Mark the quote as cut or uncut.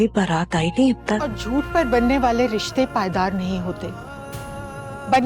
cut